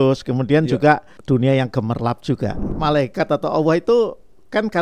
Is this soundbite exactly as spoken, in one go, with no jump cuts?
no; 2 cuts; at 1.1 s, 2.7 s

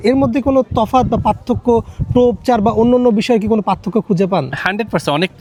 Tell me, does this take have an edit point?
no; 0 cuts

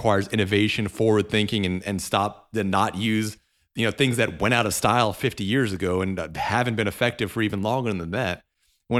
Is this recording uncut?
yes; 0 cuts

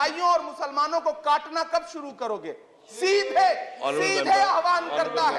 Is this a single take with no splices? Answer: yes; 0 cuts

